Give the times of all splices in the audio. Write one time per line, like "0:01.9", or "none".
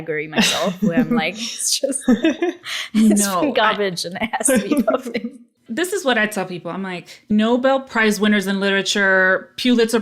0:05.6
0:07.3